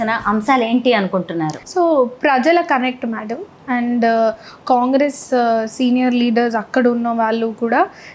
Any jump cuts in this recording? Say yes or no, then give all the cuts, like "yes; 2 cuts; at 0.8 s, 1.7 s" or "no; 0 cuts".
no; 0 cuts